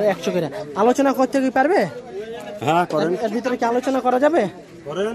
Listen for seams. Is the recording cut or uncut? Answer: uncut